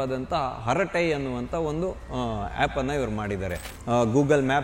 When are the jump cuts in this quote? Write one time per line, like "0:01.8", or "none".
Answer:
0:03.7